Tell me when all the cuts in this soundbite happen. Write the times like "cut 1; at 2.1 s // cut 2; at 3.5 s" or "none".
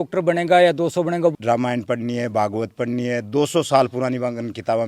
cut 1; at 1.3 s